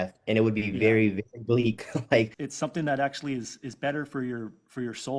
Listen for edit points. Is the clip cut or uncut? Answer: cut